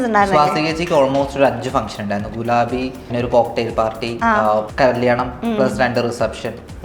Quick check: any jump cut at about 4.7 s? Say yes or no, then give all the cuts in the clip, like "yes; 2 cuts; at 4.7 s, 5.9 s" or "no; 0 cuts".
yes; 2 cuts; at 3.1 s, 4.7 s